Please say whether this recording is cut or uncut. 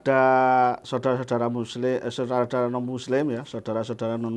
uncut